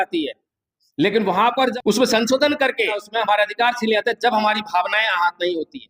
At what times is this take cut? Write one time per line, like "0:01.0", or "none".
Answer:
0:01.7
0:03.0

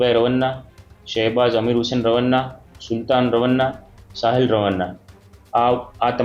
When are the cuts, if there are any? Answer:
none

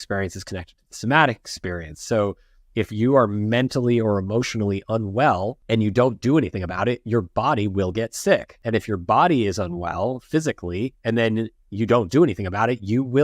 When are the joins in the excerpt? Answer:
0:05.6
0:08.5
0:11.0

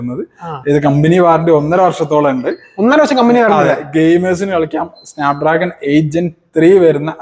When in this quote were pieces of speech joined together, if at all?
none

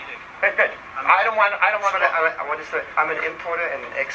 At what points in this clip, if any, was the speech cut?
0:02.9

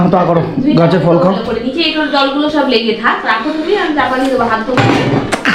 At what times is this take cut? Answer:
none

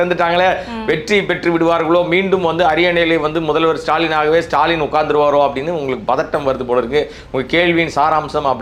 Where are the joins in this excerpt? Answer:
none

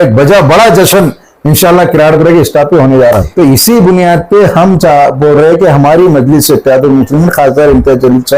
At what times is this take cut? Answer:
0:03.3

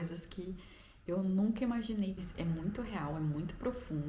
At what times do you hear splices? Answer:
0:02.2

